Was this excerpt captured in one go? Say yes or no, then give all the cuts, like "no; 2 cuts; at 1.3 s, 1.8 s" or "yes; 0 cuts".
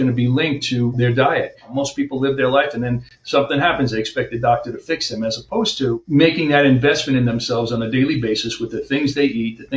no; 2 cuts; at 1.7 s, 6.0 s